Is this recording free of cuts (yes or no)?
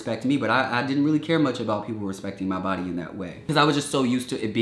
no